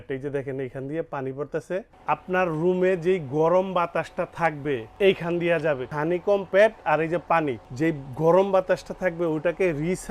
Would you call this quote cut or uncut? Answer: cut